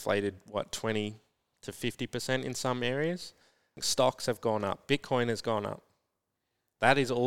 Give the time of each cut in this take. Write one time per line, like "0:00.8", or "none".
0:03.8